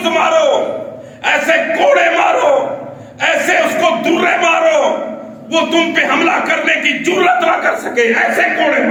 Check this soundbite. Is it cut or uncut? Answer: uncut